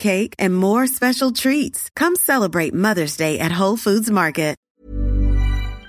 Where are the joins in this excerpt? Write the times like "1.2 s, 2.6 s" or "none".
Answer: 4.6 s